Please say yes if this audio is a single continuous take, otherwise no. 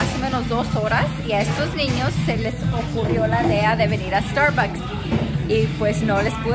yes